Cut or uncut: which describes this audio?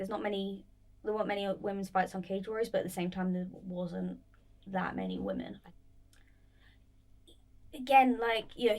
cut